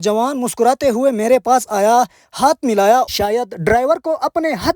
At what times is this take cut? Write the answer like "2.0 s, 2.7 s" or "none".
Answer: 3.1 s